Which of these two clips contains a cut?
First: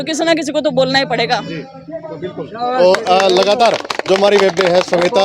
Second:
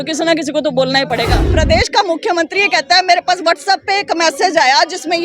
second; 1 cut; at 1.4 s

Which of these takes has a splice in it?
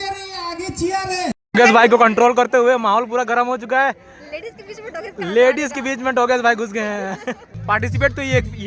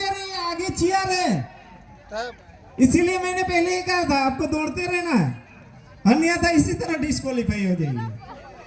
first; 2 cuts; at 1.3 s, 7.5 s

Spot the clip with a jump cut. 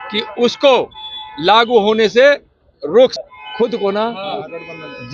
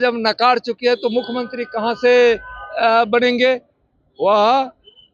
first; 1 cut; at 3.2 s

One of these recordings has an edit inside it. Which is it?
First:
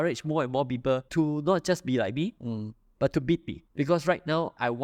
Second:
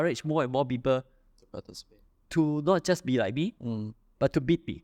first; 2 cuts; at 1.1 s, 3.6 s

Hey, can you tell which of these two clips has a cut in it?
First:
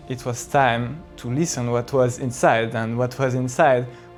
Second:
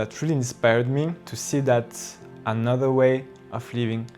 second; 1 cut; at 1.3 s

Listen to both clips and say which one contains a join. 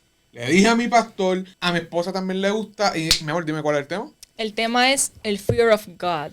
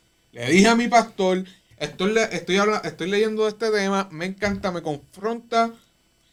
first; 1 cut; at 1.5 s

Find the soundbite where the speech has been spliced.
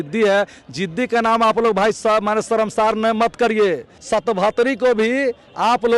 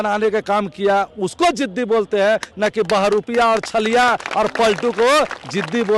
first; 1 cut; at 4.0 s

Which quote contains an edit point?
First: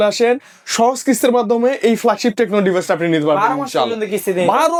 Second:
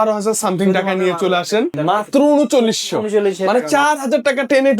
second; 1 cut; at 1.8 s

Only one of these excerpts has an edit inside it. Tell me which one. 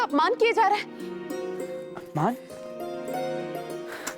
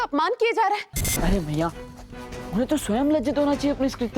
second; 1 cut; at 1.0 s

